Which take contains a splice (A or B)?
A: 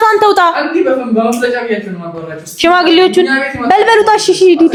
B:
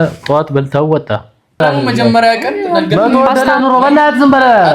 B